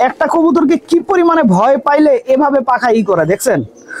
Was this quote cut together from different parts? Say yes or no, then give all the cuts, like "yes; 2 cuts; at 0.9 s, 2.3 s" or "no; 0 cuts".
no; 0 cuts